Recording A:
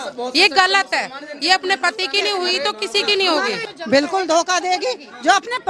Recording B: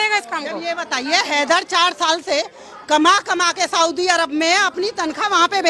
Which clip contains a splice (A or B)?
A